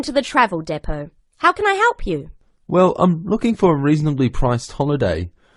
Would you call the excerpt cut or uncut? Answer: uncut